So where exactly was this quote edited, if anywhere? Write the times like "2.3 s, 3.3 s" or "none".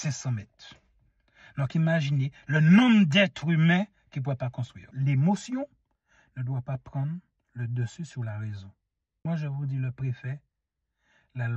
4.9 s, 9.3 s